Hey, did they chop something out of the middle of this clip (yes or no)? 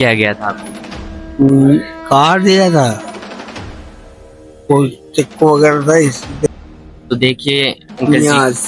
yes